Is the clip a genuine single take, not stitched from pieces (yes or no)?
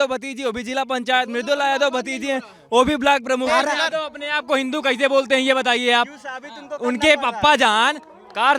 no